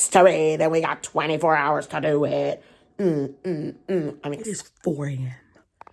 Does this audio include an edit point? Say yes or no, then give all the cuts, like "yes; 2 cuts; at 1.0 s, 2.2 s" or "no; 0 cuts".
yes; 1 cut; at 4.5 s